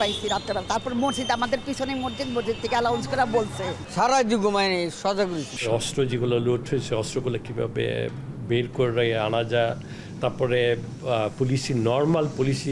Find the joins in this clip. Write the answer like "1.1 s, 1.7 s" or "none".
3.8 s, 5.5 s